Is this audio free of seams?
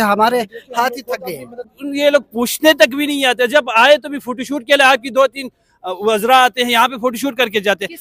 no; 1 cut; at 1.6 s

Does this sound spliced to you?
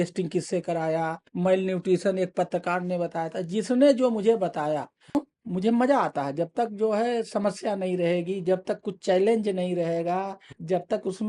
yes; 1 cut; at 5.2 s

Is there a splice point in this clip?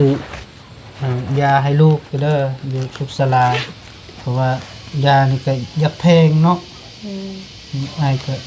no; 0 cuts

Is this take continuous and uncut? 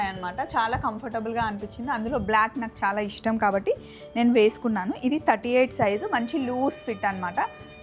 yes; 0 cuts

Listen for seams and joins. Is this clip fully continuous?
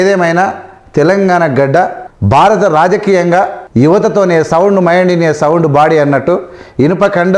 no; 2 cuts; at 2.1 s, 3.6 s

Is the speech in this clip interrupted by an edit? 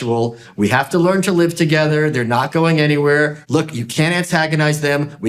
yes; 1 cut; at 3.4 s

